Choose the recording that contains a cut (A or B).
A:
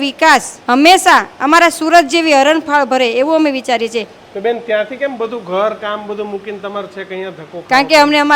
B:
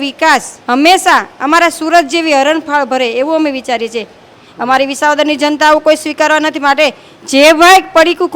B